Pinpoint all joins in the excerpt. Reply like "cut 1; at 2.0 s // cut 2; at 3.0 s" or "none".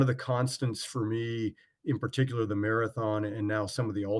none